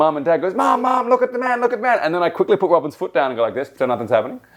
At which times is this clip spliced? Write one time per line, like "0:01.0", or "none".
none